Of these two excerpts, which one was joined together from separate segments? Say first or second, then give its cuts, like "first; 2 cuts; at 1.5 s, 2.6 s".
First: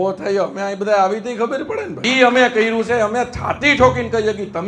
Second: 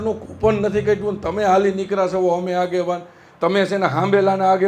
first; 1 cut; at 2.0 s